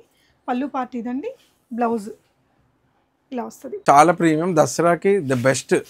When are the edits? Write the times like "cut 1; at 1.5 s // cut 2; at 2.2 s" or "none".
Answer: cut 1; at 3.8 s